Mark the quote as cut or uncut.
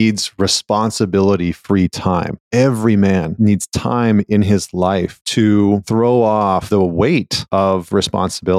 cut